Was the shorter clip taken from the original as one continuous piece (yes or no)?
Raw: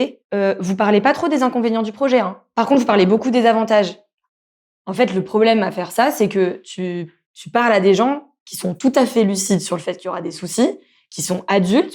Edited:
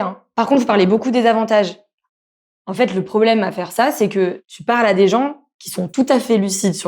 no